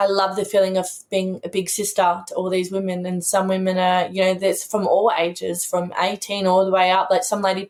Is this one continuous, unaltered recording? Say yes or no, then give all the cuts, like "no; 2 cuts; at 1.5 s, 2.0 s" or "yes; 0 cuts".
yes; 0 cuts